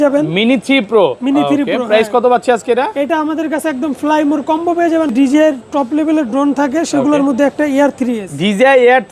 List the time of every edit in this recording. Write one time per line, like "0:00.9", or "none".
0:05.1